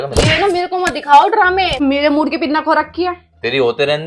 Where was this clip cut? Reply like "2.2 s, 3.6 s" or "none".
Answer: 1.8 s